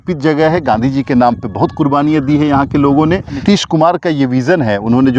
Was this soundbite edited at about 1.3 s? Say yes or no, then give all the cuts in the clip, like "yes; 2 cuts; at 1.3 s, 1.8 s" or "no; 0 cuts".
no; 1 cut; at 3.4 s